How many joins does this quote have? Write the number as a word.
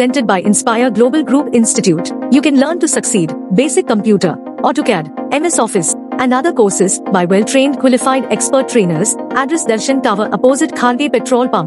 zero